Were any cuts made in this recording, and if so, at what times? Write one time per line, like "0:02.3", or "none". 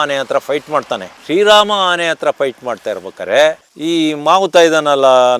0:03.7